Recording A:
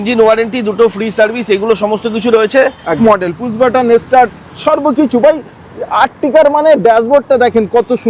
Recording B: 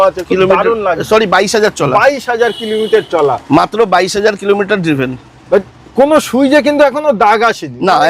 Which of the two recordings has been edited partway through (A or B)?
A